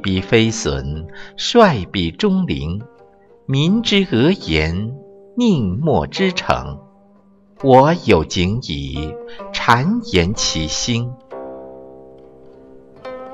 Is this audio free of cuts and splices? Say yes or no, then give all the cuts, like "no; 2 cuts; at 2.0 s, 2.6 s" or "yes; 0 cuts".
no; 1 cut; at 11.1 s